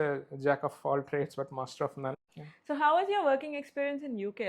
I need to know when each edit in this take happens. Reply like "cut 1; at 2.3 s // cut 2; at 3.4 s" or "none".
cut 1; at 2.1 s